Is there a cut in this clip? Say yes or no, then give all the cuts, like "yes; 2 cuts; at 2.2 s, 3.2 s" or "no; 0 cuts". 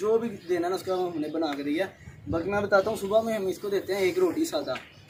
no; 0 cuts